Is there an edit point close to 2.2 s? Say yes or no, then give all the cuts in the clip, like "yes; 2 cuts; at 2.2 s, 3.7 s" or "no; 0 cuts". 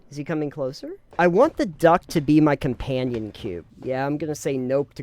no; 2 cuts; at 1.0 s, 3.7 s